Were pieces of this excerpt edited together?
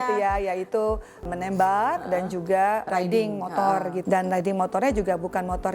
yes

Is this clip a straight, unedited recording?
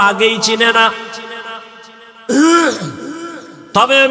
yes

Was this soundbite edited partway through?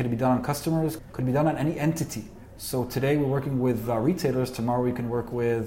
yes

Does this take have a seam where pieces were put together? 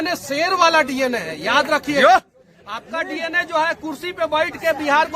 no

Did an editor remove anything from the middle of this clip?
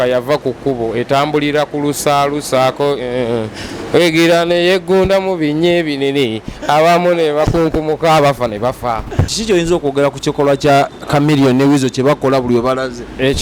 yes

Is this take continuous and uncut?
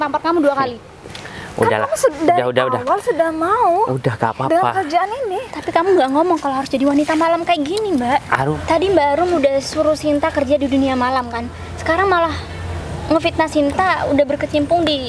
no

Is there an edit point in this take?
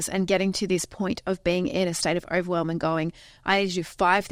no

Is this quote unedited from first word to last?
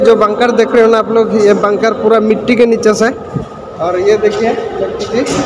yes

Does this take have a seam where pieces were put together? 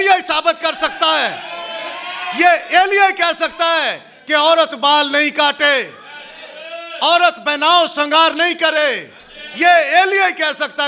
no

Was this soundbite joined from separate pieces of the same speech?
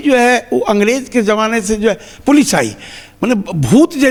no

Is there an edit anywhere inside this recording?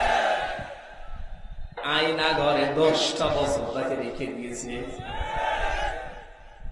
yes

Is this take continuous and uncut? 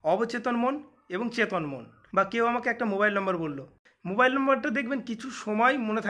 no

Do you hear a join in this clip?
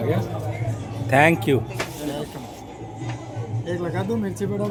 no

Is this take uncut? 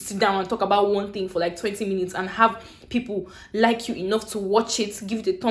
yes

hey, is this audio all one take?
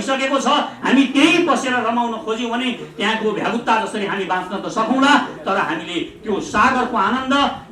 yes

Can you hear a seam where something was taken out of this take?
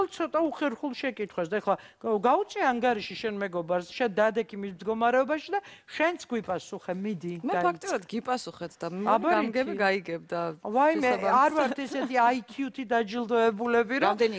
yes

